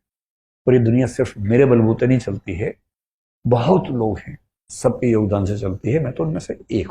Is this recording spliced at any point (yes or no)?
no